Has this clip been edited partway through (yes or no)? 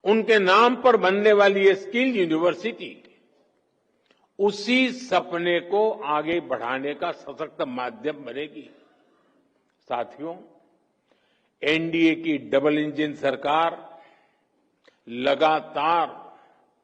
no